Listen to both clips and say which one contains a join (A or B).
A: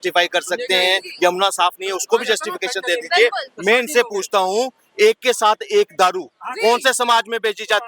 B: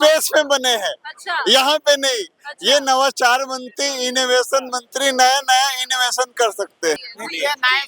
B